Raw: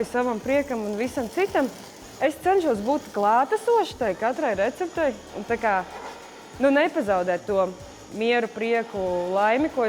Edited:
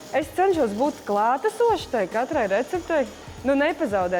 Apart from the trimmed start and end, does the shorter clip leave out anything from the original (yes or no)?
yes